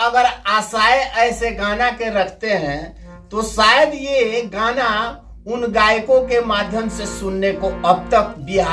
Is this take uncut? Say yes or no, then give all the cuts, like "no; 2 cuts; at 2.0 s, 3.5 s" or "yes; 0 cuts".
yes; 0 cuts